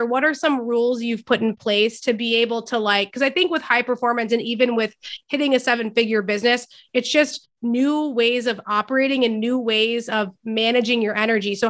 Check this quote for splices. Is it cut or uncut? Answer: uncut